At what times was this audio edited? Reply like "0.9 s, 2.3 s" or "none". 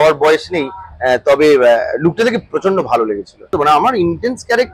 3.5 s